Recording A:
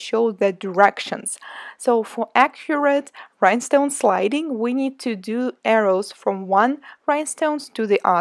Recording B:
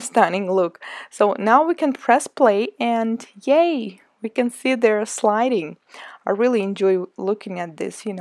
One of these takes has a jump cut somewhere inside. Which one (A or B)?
A